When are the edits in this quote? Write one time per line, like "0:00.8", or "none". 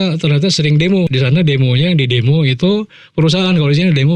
0:01.1